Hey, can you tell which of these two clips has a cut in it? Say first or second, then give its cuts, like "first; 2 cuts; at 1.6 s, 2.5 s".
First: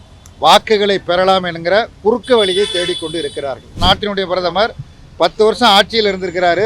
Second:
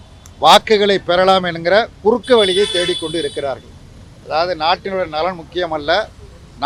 first; 1 cut; at 3.8 s